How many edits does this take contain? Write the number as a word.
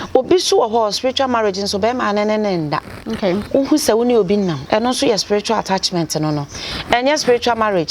one